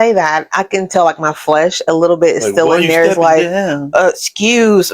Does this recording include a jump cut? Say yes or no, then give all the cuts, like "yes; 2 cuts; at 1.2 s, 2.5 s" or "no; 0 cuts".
no; 0 cuts